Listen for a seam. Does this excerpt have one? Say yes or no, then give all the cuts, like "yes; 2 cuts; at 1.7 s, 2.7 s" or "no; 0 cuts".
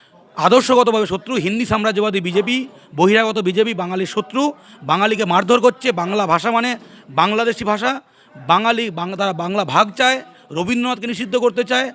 no; 0 cuts